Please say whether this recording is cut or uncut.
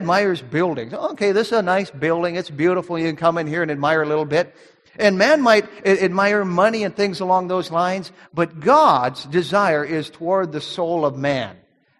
uncut